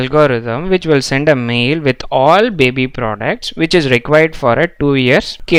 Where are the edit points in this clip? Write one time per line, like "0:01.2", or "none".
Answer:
none